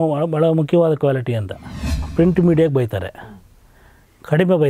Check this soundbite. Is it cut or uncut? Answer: cut